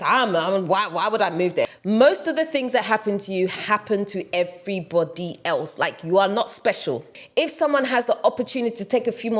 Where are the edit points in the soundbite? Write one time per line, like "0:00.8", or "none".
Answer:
0:01.7
0:07.2